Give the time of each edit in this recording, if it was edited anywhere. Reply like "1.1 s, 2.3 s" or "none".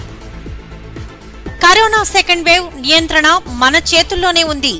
1.1 s